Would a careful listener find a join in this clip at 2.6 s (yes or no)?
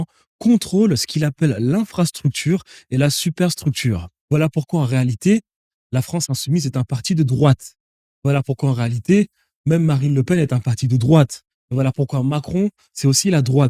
no